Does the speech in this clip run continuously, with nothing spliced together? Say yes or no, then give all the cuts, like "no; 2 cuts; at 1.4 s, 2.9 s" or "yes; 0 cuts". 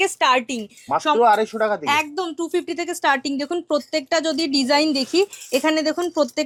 yes; 0 cuts